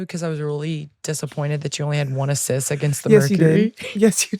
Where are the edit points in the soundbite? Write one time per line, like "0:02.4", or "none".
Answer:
none